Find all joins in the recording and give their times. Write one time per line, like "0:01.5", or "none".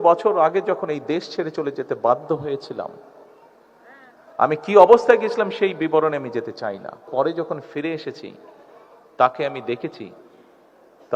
0:07.1